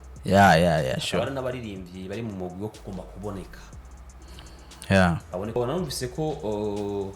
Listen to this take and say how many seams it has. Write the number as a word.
one